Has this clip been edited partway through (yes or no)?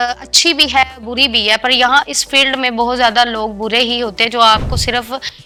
no